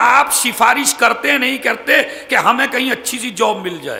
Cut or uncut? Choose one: uncut